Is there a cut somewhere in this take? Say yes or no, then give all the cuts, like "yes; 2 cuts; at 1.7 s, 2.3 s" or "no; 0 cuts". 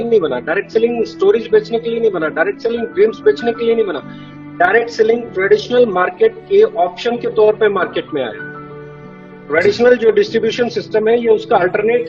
no; 0 cuts